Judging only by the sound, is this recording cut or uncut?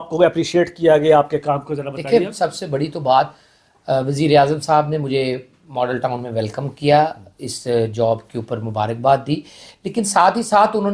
uncut